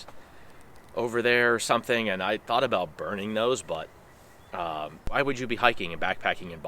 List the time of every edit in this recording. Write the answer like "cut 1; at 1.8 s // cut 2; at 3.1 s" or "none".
cut 1; at 5.1 s